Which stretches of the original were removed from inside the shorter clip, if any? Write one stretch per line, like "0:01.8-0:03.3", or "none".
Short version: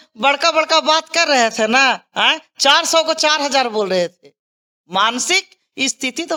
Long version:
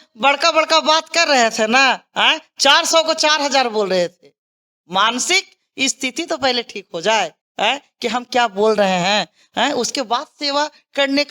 none